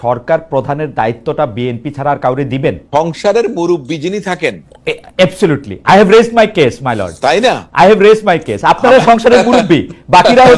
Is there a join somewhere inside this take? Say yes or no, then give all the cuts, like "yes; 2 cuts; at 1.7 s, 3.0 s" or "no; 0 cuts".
no; 0 cuts